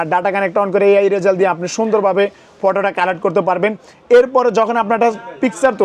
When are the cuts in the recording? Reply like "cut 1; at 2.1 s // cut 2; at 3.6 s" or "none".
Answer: none